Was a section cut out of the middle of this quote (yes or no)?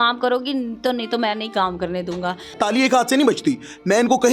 yes